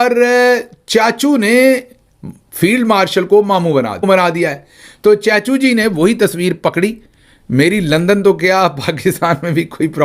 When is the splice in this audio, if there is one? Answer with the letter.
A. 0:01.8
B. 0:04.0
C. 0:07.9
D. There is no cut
B